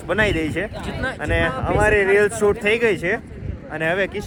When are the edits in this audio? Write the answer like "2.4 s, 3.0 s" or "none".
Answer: none